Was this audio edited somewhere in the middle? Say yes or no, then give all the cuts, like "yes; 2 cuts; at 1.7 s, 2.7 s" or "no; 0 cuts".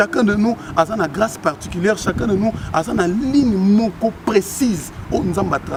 no; 0 cuts